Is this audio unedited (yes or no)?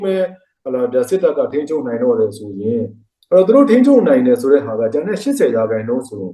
yes